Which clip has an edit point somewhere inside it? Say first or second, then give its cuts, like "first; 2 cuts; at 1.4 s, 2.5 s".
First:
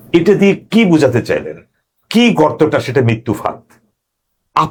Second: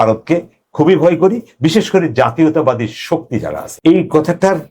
second; 1 cut; at 3.6 s